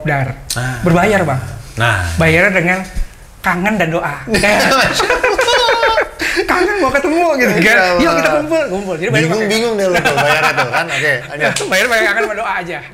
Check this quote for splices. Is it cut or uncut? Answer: uncut